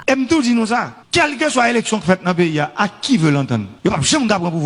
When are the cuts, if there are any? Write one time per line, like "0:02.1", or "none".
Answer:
0:01.0
0:03.7